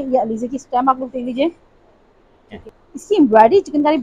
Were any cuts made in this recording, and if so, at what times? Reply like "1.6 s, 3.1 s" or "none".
2.5 s